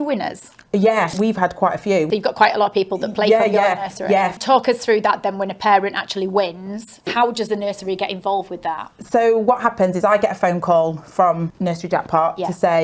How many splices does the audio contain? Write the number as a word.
five